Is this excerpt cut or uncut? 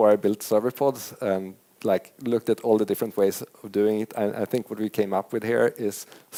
uncut